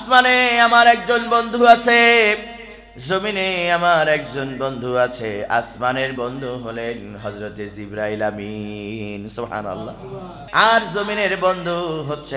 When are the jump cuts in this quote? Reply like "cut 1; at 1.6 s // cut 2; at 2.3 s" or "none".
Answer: cut 1; at 10.3 s